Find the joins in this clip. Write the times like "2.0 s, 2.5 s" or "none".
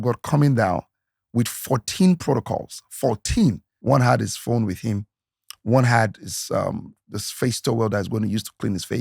3.7 s